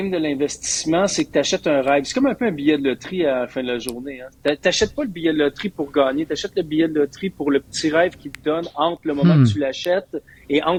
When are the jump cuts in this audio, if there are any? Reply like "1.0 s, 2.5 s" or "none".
none